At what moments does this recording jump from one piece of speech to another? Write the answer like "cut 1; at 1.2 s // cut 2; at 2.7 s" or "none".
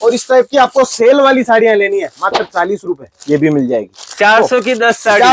none